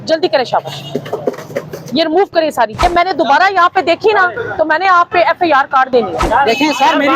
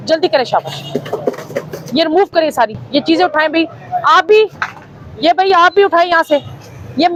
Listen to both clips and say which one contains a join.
first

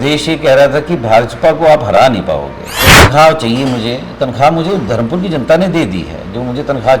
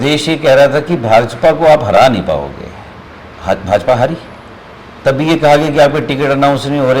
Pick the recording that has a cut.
first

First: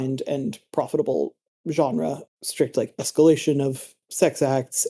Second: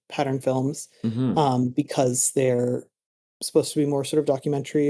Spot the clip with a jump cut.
first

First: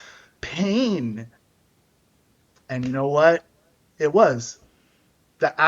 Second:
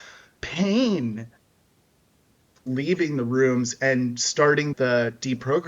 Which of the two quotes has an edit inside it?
second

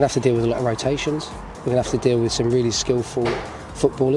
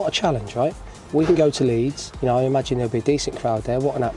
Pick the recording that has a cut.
second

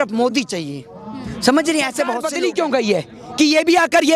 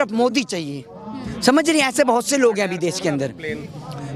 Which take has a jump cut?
first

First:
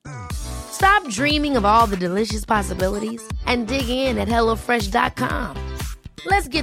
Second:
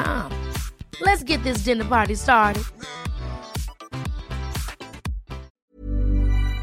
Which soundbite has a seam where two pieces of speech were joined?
second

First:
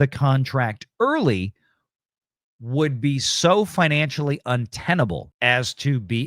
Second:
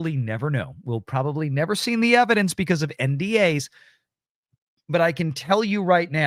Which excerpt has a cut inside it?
first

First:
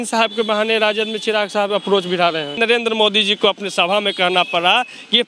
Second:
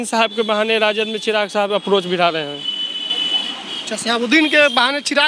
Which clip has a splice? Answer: first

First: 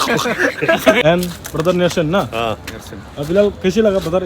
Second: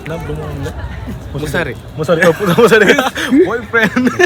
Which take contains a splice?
first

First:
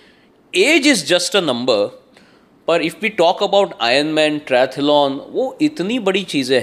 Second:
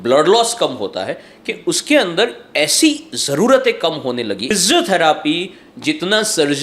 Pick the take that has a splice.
second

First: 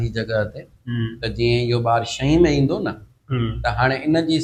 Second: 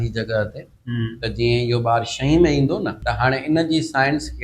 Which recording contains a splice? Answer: second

